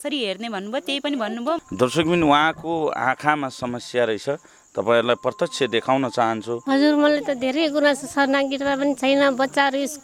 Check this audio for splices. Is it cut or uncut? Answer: cut